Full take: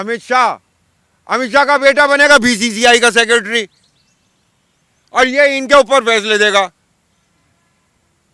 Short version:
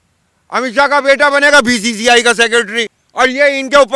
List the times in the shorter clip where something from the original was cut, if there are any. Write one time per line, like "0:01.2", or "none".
0:03.0